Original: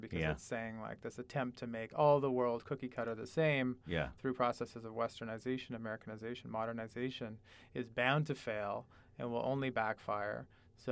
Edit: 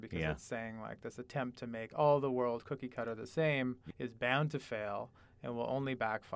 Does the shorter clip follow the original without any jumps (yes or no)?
no